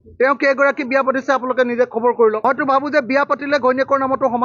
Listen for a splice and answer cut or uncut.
cut